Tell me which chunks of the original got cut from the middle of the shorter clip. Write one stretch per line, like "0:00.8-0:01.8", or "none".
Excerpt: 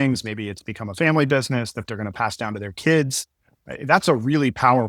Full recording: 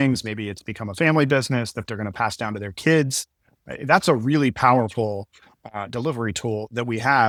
none